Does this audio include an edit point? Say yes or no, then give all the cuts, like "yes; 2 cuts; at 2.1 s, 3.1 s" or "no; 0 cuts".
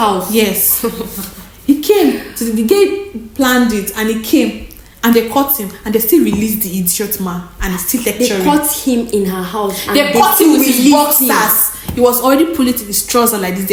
no; 0 cuts